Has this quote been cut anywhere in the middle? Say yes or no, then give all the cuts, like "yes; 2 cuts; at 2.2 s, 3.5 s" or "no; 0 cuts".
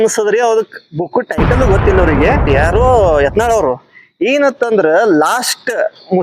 yes; 1 cut; at 2.5 s